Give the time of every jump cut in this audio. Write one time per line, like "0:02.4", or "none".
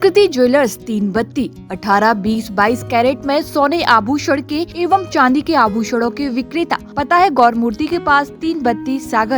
0:04.7
0:06.9